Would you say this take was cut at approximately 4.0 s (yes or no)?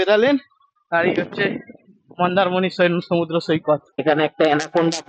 yes